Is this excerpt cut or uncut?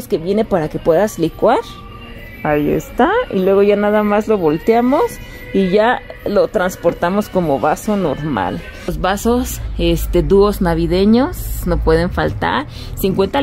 cut